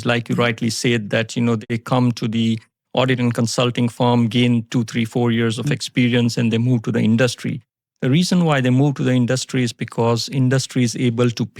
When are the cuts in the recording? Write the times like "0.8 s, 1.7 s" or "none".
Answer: 1.6 s

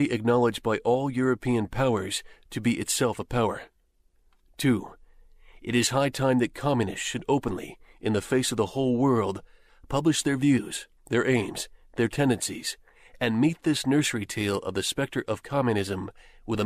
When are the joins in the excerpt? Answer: 14.3 s

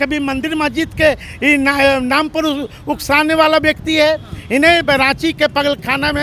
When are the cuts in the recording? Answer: none

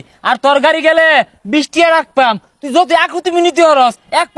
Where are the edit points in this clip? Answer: none

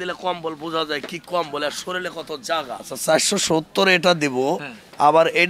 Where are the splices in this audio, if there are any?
2.8 s

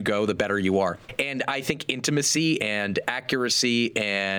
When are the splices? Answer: 1.0 s

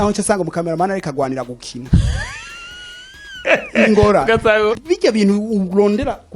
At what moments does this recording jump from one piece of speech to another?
4.8 s

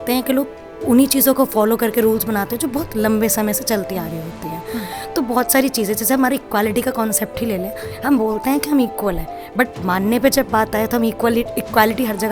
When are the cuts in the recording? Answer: none

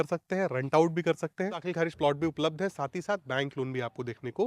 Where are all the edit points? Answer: 1.7 s

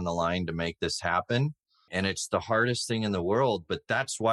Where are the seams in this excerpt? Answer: 1.9 s

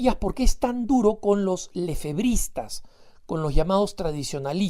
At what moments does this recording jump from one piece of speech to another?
1.3 s

